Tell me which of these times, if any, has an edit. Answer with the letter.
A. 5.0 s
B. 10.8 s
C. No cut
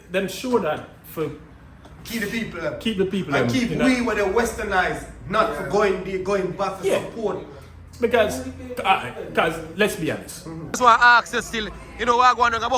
B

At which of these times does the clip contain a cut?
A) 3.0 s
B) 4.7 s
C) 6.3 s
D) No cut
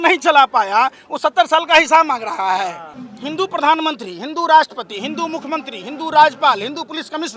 A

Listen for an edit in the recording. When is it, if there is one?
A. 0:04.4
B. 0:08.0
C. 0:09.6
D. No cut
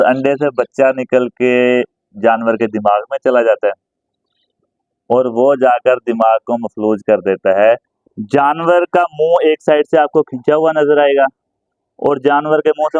B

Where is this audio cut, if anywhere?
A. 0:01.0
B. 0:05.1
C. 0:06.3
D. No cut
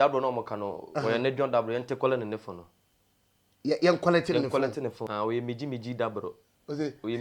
B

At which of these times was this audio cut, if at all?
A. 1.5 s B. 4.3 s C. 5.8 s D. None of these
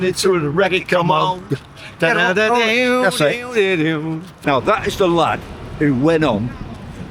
B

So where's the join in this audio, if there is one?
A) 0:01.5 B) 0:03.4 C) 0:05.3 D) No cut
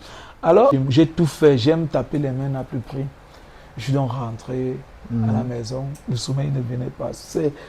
B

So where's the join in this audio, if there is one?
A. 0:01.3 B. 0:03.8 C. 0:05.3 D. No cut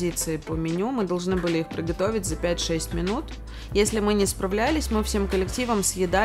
D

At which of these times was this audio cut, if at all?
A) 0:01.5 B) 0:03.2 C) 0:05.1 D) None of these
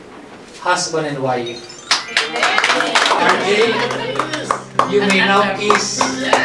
B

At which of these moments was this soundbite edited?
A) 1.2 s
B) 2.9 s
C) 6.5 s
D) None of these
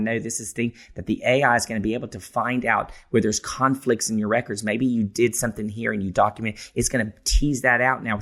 D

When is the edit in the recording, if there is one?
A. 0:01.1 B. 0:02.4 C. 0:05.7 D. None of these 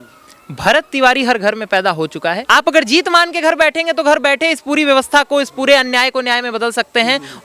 B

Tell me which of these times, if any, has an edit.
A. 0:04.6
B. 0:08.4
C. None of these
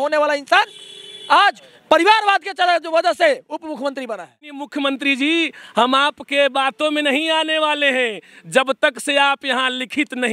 A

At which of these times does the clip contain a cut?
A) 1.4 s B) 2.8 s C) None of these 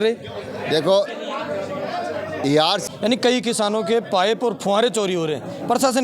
B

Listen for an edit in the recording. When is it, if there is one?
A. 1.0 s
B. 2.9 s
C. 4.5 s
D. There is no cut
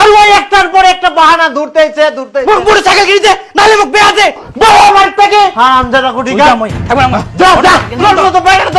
C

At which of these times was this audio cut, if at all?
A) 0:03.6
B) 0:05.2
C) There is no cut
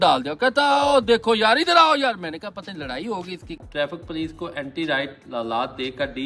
A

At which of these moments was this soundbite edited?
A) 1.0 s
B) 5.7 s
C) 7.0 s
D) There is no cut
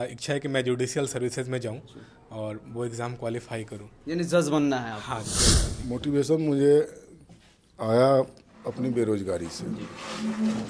B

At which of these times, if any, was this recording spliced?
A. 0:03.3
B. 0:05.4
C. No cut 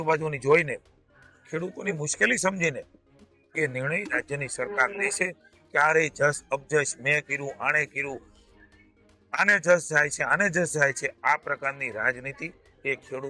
C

